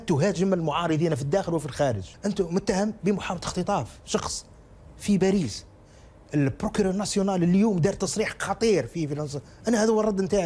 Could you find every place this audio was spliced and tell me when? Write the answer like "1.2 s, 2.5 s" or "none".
2.1 s